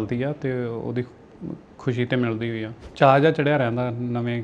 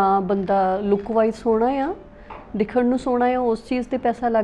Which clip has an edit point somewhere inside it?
first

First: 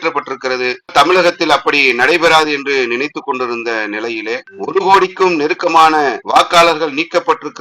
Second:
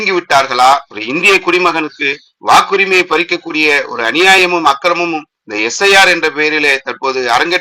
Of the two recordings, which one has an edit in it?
first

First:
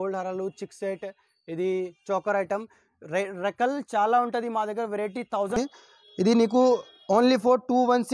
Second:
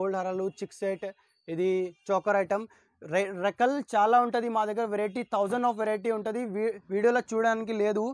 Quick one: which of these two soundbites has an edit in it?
first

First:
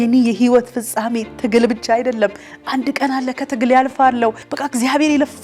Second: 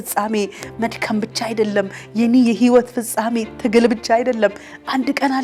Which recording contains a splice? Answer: first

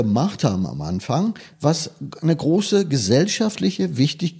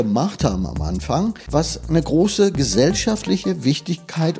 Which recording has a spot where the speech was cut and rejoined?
second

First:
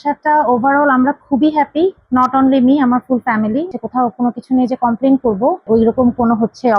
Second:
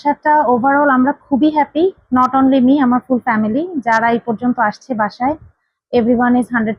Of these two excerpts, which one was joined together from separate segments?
first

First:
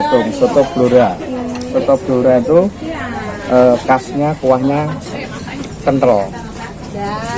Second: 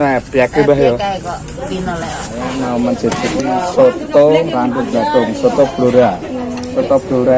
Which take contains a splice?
second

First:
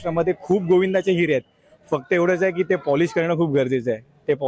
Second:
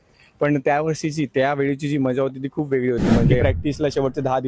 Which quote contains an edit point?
second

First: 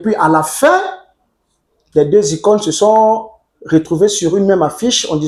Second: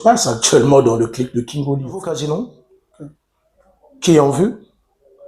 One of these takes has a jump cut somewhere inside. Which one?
second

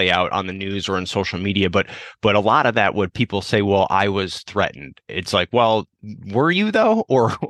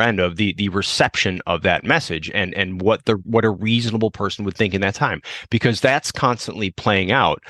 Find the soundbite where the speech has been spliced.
first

